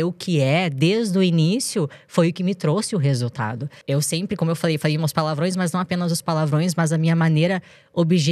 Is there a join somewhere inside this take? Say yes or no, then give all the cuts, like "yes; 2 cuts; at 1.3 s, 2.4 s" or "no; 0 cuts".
yes; 1 cut; at 3.7 s